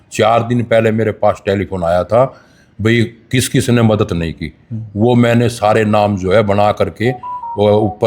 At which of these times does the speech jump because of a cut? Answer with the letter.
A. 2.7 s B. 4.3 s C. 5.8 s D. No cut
D